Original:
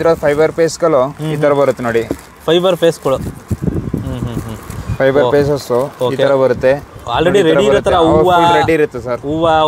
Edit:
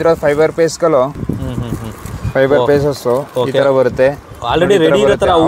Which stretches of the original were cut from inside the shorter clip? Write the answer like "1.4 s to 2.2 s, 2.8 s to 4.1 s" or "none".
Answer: 1.2 s to 3.8 s